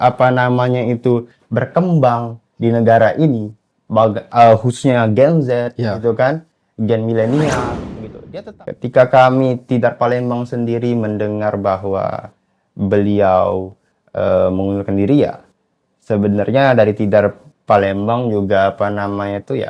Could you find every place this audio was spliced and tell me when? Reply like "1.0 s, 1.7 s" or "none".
8.1 s